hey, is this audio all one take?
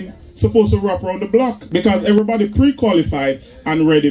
yes; 0 cuts

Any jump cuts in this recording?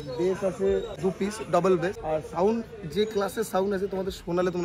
yes; 2 cuts; at 0.9 s, 2.0 s

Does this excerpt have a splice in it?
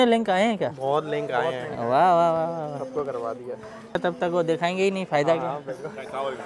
no; 0 cuts

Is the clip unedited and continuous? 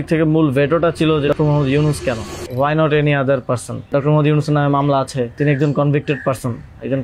no; 4 cuts; at 1.3 s, 2.4 s, 3.9 s, 5.4 s

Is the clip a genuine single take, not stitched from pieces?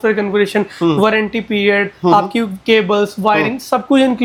yes; 0 cuts

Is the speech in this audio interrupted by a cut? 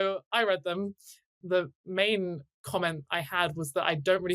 yes; 2 cuts; at 1.4 s, 2.5 s

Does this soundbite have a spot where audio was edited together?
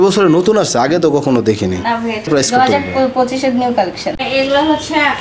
yes; 2 cuts; at 2.3 s, 4.1 s

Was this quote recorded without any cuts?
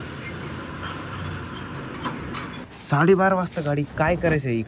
no; 1 cut; at 2.6 s

